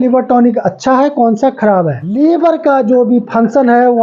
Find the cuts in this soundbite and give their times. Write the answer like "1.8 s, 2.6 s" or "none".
2.1 s